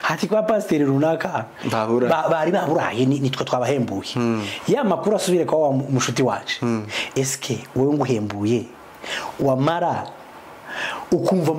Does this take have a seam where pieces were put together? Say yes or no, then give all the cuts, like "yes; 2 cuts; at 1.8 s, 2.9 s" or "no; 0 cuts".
no; 0 cuts